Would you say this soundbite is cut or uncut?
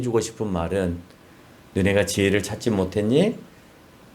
uncut